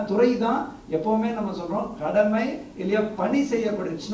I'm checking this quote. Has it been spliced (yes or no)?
no